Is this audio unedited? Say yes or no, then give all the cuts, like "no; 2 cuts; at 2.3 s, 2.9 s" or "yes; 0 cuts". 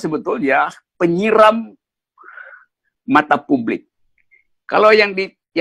yes; 0 cuts